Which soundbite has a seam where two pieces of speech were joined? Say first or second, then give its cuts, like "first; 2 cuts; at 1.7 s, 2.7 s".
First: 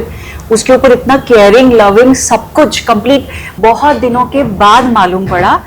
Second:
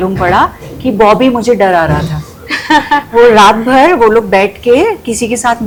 first; 1 cut; at 3.4 s